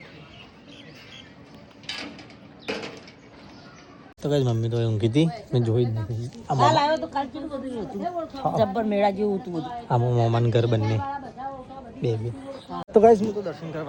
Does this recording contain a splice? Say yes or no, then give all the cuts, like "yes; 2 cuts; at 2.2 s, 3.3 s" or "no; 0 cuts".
no; 0 cuts